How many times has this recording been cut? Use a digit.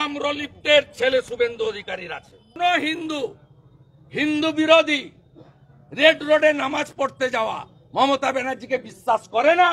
1